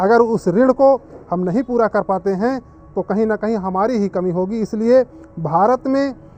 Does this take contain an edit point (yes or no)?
no